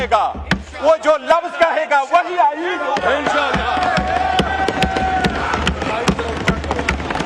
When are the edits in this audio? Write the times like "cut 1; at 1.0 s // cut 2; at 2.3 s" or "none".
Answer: none